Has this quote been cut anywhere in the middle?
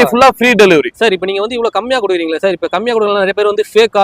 yes; 1 cut; at 0.9 s

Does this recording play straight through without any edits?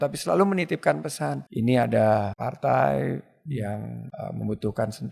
no; 3 cuts; at 1.4 s, 2.4 s, 4.0 s

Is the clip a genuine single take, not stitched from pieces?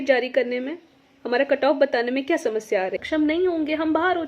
no; 1 cut; at 3.0 s

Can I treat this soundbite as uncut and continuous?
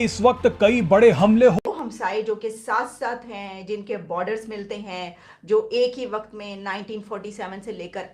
no; 1 cut; at 1.7 s

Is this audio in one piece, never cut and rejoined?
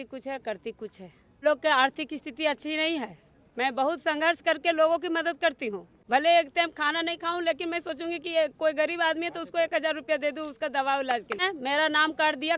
no; 3 cuts; at 1.4 s, 5.9 s, 11.5 s

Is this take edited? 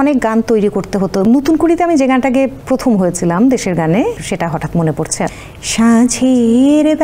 yes; 4 cuts; at 1.2 s, 2.6 s, 4.2 s, 5.3 s

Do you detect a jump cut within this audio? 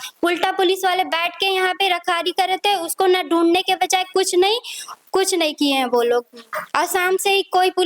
no; 0 cuts

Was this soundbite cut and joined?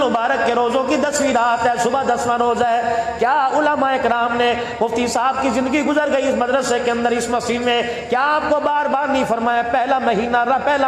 no; 0 cuts

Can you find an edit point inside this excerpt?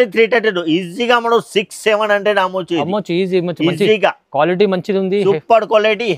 no; 0 cuts

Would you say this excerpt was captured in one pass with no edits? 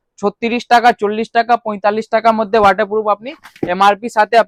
yes; 0 cuts

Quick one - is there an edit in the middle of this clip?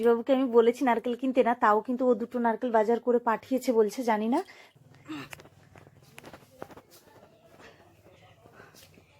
yes; 1 cut; at 4.6 s

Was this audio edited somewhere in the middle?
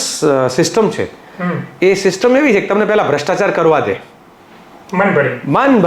no; 0 cuts

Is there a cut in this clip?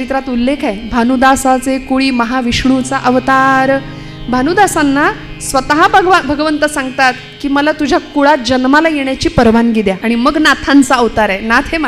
yes; 1 cut; at 10.0 s

